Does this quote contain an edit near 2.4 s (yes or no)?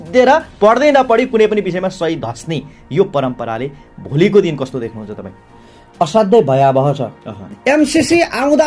no